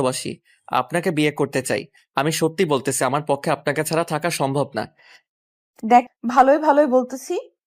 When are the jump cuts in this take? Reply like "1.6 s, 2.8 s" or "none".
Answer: 2.0 s, 6.1 s